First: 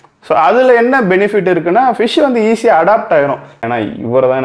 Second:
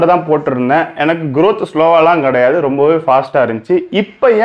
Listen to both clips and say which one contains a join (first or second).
first